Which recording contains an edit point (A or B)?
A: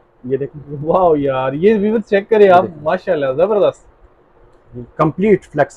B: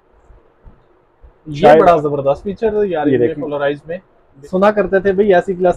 B